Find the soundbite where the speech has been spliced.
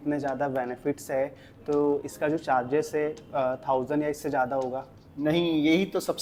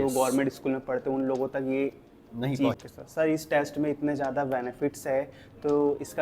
second; 1 cut; at 2.7 s

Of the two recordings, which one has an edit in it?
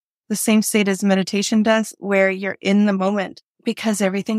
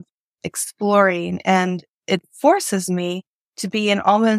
first; 1 cut; at 3.4 s

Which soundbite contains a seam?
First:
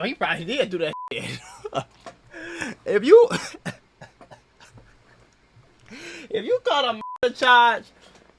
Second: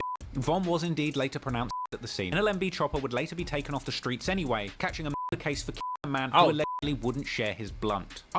second; 1 cut; at 2.3 s

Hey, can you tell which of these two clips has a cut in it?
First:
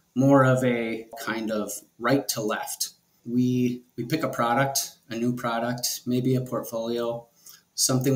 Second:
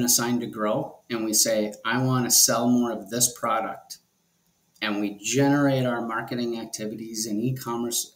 first; 2 cuts; at 1.2 s, 3.2 s

